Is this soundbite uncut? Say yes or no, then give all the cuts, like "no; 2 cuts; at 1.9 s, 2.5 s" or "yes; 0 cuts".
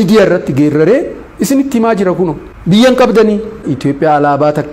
no; 2 cuts; at 2.5 s, 3.7 s